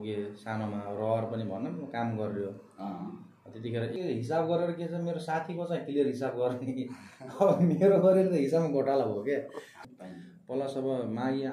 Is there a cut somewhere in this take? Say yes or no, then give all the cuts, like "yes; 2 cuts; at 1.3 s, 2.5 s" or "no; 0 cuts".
yes; 2 cuts; at 3.9 s, 9.8 s